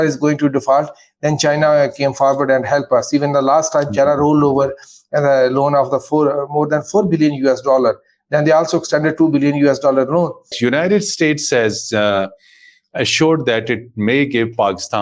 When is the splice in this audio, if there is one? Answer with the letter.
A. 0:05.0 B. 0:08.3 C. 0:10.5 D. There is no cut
C